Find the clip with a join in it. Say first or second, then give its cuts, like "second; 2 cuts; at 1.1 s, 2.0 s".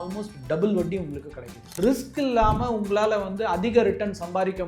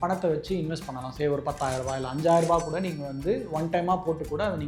first; 1 cut; at 1.7 s